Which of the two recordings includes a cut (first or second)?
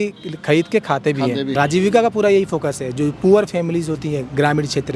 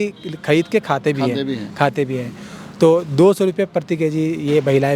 first